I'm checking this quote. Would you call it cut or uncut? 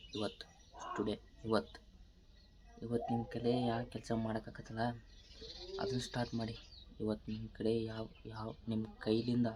uncut